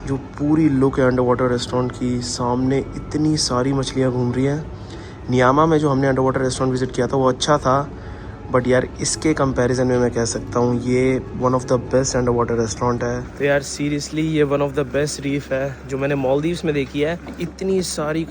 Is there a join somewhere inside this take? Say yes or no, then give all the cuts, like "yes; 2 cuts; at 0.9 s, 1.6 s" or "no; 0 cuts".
yes; 2 cuts; at 13.3 s, 17.4 s